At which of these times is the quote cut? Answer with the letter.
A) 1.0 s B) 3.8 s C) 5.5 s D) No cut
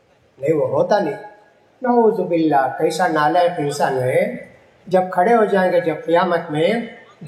D